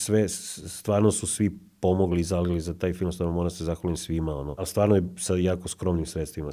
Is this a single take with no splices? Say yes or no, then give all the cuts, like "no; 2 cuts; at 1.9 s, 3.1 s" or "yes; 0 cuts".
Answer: no; 1 cut; at 4.7 s